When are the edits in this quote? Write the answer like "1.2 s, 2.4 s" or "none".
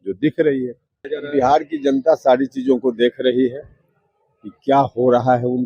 1.0 s